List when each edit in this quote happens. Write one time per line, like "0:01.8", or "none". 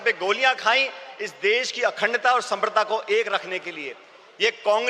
none